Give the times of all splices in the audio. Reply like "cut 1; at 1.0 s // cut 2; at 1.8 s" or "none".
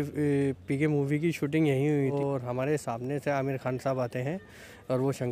cut 1; at 2.1 s